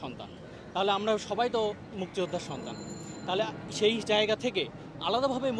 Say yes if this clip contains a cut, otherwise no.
no